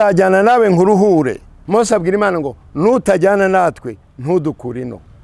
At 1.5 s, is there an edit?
yes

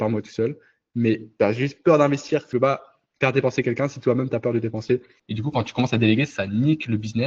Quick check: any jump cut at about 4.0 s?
no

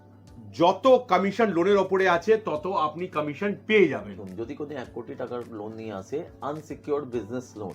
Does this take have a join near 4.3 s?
yes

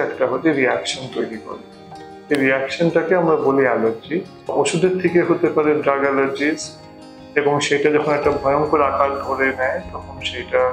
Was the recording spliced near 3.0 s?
no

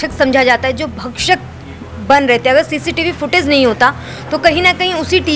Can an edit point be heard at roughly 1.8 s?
no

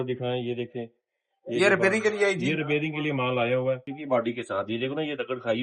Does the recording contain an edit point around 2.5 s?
no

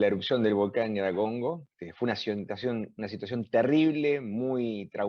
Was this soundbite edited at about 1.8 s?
yes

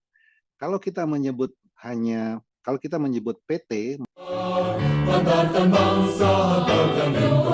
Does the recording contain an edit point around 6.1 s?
no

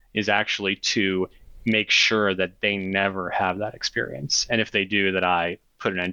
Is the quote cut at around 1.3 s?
no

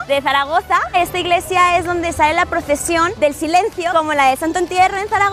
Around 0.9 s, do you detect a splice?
yes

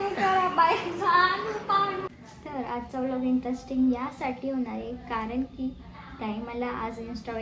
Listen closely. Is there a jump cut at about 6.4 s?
no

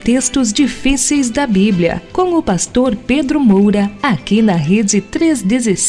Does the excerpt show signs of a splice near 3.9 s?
yes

